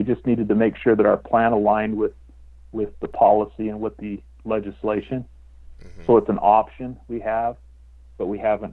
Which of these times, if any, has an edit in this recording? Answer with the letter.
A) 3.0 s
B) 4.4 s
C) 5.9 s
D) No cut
D